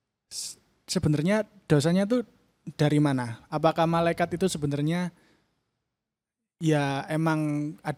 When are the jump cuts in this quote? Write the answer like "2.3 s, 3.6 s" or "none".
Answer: none